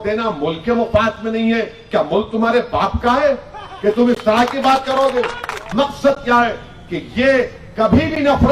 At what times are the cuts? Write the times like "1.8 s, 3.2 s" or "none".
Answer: 5.7 s